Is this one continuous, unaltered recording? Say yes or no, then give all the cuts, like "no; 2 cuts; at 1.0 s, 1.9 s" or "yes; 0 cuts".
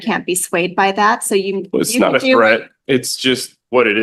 yes; 0 cuts